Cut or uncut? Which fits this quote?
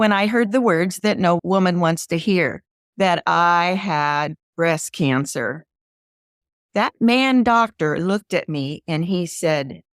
cut